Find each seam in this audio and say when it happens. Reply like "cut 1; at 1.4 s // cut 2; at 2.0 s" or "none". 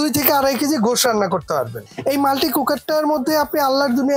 cut 1; at 1.9 s